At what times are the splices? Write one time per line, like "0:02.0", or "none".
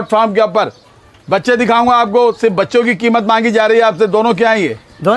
none